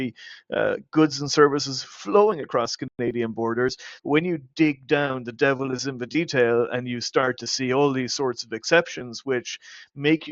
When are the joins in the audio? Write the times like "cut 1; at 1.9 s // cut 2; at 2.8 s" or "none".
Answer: none